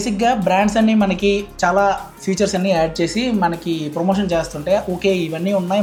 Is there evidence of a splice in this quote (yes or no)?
no